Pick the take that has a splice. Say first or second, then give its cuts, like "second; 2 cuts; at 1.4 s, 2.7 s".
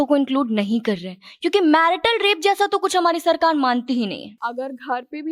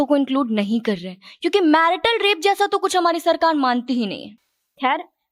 first; 1 cut; at 4.3 s